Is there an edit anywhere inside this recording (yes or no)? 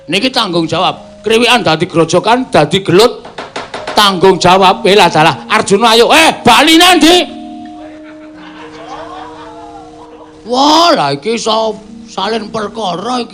yes